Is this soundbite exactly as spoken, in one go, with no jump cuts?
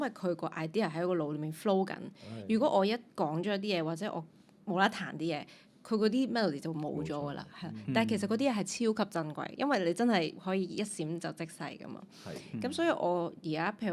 yes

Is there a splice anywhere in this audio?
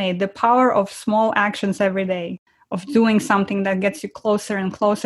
yes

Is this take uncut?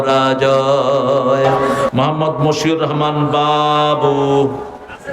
no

